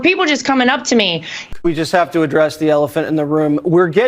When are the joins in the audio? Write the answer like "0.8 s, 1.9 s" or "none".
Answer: 1.3 s